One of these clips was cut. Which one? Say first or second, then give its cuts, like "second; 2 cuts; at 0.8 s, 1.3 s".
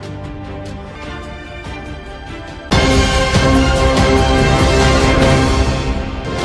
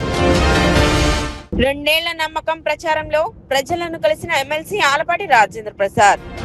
second; 1 cut; at 1.3 s